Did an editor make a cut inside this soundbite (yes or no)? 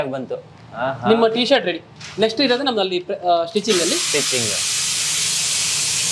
no